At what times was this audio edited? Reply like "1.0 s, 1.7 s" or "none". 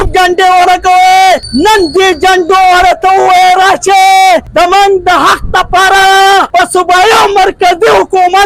1.5 s, 4.5 s, 6.5 s